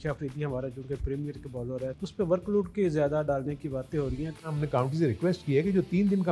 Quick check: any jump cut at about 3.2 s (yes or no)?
no